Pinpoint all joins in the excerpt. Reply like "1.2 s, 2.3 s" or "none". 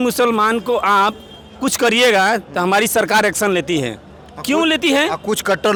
none

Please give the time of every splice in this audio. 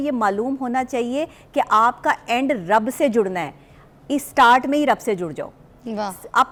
none

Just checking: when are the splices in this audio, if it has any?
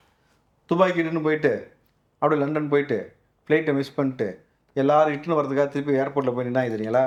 none

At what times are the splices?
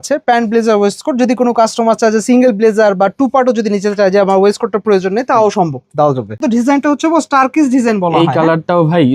6.4 s

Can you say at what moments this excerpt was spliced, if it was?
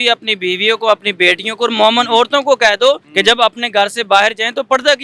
3.1 s

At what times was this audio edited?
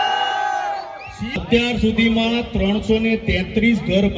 1.4 s

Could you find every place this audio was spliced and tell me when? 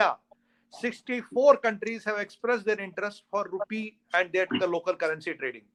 none

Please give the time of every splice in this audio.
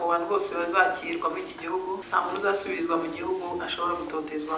2.0 s

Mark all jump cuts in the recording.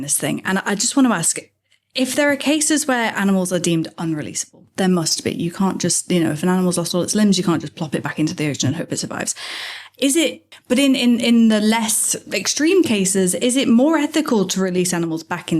10.5 s

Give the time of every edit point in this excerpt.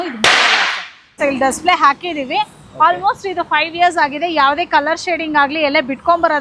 1.1 s

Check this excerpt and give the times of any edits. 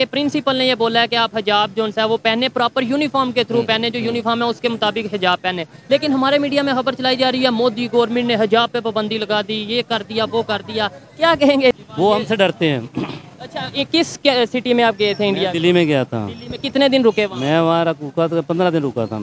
11.8 s

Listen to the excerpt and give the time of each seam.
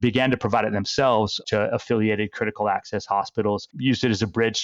3.7 s

